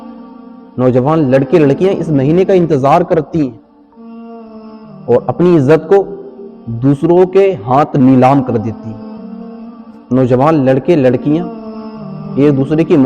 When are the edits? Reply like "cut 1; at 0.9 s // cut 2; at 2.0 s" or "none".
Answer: cut 1; at 9.0 s // cut 2; at 10.0 s